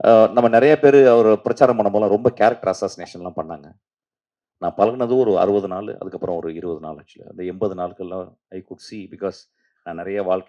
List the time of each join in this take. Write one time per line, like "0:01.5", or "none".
none